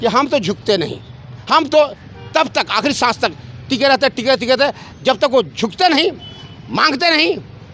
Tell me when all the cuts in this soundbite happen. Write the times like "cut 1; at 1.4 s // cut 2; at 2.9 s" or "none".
none

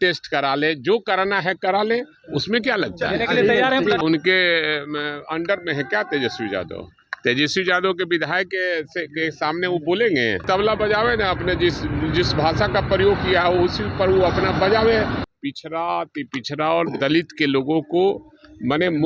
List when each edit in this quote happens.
cut 1; at 4.0 s // cut 2; at 10.4 s // cut 3; at 15.2 s

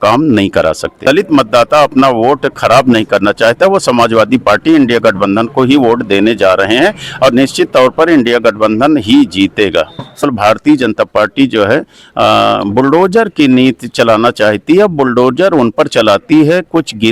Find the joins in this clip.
cut 1; at 1.0 s // cut 2; at 10.2 s

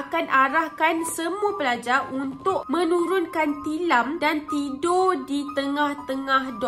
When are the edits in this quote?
none

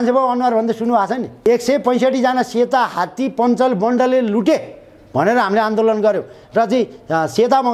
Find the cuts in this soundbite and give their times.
cut 1; at 1.4 s

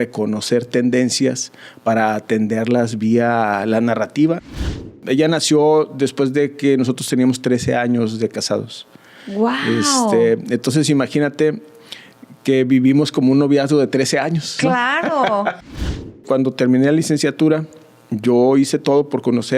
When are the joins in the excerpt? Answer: cut 1; at 5.0 s // cut 2; at 16.1 s

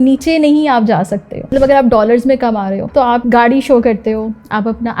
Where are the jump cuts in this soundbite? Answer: cut 1; at 1.4 s // cut 2; at 3.2 s

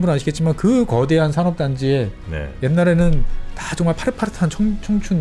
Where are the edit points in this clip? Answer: none

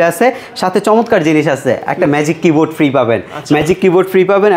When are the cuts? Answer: none

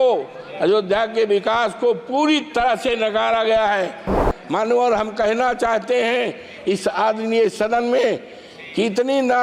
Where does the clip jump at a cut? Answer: cut 1; at 4.2 s

